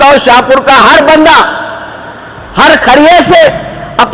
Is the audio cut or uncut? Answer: uncut